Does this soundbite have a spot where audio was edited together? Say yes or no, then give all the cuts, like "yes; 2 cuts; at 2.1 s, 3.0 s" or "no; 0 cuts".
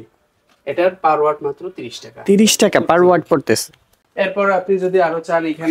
no; 0 cuts